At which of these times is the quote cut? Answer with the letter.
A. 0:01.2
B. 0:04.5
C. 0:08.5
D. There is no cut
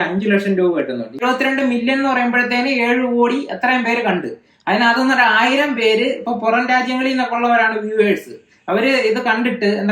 A